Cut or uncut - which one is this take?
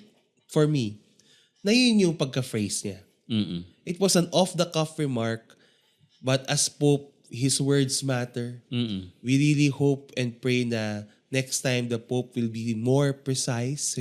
uncut